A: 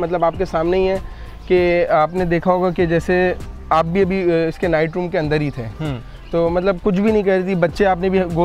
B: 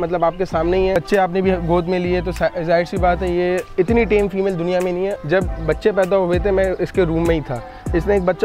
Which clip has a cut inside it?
B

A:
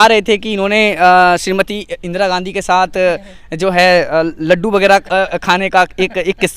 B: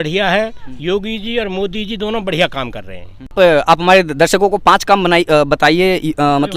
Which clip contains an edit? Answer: B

